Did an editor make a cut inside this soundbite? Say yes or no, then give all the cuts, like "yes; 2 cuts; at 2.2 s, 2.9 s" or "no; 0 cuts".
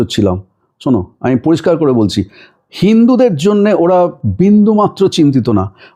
no; 0 cuts